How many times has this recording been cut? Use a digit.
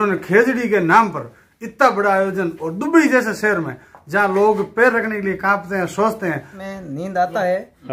1